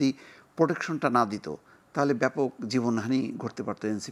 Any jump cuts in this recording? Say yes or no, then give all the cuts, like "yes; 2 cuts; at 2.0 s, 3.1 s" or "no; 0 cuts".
no; 0 cuts